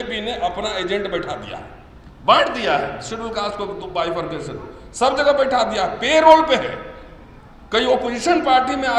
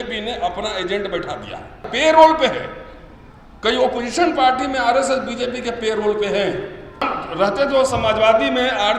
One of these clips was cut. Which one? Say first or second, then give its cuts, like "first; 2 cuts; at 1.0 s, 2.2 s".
second; 2 cuts; at 1.9 s, 7.1 s